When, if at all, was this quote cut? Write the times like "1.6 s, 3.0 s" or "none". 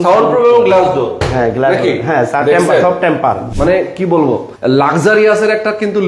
3.5 s, 4.5 s